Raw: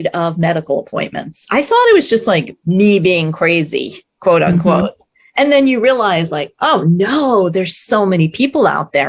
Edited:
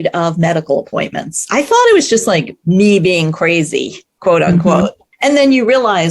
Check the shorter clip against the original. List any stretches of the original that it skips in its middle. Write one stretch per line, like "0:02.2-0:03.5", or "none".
0:05.0-0:05.2